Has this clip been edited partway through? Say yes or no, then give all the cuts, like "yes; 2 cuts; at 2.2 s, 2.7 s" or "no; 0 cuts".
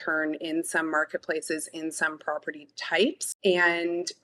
yes; 1 cut; at 3.3 s